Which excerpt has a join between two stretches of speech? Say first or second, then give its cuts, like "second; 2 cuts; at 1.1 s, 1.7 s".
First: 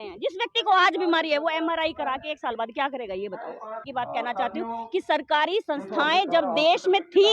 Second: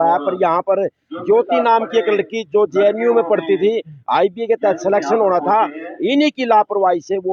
first; 1 cut; at 3.9 s